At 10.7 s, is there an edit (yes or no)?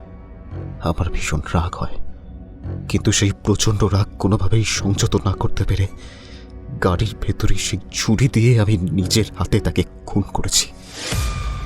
yes